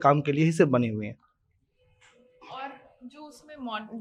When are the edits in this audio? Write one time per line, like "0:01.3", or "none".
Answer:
none